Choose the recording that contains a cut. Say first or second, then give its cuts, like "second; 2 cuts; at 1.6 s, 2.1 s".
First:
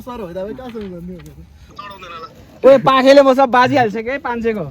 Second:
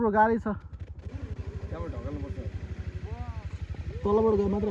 first; 1 cut; at 1.6 s